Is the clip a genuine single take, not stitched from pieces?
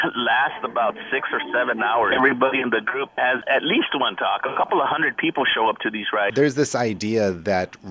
no; 4 cuts; at 2.1 s, 3.4 s, 4.5 s, 6.3 s

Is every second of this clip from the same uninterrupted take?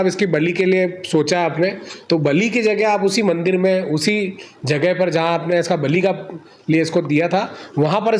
yes; 0 cuts

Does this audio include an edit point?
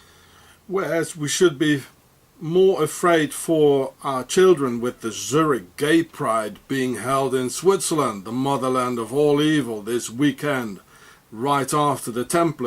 yes; 1 cut; at 7.6 s

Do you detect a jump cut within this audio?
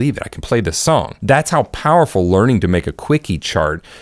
yes; 1 cut; at 1.1 s

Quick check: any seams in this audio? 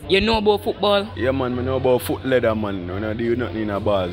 yes; 2 cuts; at 1.1 s, 2.8 s

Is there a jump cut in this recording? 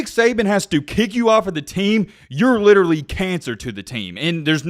no; 0 cuts

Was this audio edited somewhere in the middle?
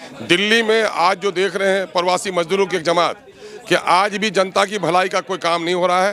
no; 0 cuts

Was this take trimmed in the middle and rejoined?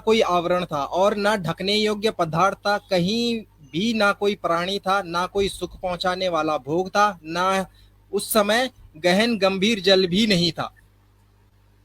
no; 0 cuts

